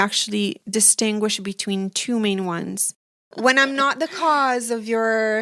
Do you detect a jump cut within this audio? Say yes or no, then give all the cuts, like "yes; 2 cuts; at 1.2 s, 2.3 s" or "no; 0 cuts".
yes; 1 cut; at 3.2 s